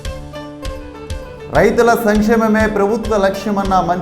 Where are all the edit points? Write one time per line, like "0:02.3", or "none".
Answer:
0:01.0